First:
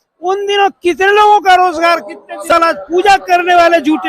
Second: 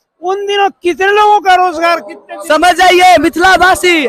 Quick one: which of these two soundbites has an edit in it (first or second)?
first